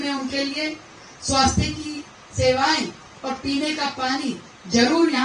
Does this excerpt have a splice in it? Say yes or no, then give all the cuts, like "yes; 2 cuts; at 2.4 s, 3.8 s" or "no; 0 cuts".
no; 0 cuts